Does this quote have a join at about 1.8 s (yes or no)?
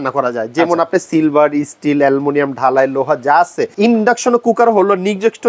no